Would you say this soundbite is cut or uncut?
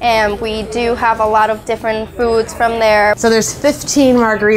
cut